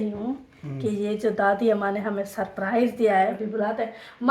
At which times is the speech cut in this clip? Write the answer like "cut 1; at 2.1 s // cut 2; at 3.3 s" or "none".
cut 1; at 3.3 s